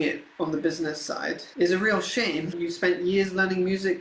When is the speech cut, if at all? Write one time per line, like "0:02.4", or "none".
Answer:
0:01.5
0:02.5